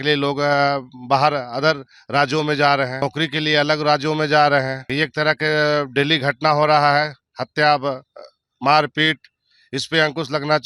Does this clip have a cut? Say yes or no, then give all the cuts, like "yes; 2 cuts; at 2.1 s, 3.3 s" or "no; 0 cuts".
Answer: yes; 2 cuts; at 3.0 s, 4.8 s